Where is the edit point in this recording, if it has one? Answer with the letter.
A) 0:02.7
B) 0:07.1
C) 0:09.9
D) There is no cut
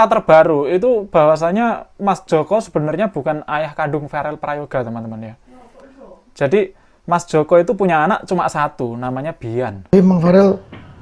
C